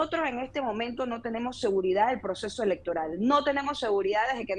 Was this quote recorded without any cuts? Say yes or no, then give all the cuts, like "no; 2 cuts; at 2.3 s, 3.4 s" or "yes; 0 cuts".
yes; 0 cuts